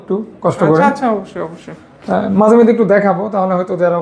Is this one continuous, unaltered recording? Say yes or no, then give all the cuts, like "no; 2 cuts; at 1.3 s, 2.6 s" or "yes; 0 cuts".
yes; 0 cuts